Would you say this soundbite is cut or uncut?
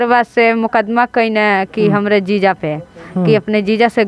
uncut